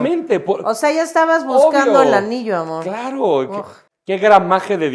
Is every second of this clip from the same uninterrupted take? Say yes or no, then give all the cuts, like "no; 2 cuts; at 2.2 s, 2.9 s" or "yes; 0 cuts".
no; 1 cut; at 3.7 s